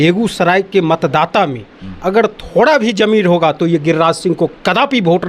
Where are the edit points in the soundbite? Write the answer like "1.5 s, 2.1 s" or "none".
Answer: none